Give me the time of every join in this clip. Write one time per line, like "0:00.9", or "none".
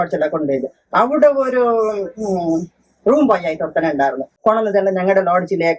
0:04.3